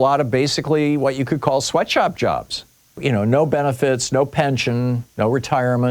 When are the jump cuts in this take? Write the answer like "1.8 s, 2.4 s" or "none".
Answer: 3.0 s